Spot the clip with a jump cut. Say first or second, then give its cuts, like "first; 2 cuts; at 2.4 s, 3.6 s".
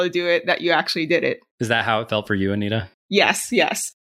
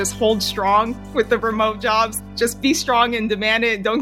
second; 2 cuts; at 1.0 s, 2.2 s